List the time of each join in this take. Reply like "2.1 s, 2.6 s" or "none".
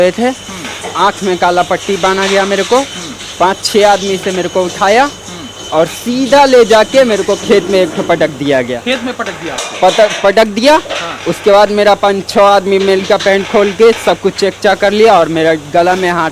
none